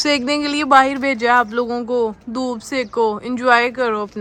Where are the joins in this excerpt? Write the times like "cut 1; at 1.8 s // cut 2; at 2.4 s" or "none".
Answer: none